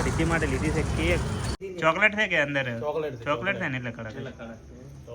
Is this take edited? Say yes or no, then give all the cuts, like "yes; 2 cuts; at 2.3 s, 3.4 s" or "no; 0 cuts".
yes; 1 cut; at 1.6 s